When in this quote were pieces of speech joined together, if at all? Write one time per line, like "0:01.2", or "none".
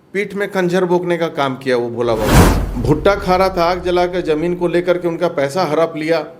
0:02.5